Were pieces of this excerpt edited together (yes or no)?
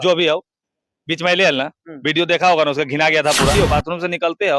yes